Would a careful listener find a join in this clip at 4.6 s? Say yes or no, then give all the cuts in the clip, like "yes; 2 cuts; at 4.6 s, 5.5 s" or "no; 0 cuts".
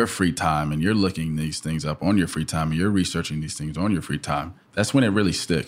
yes; 1 cut; at 4.6 s